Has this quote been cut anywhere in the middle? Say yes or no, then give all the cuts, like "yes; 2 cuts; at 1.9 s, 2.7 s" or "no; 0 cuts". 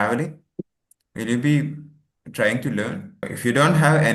yes; 1 cut; at 3.2 s